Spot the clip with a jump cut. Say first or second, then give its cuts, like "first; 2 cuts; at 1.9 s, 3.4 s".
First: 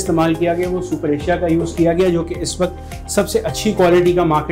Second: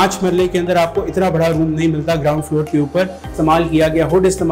second; 1 cut; at 3.2 s